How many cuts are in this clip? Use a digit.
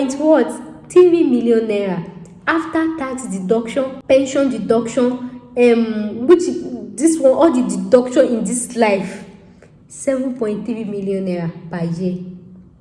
1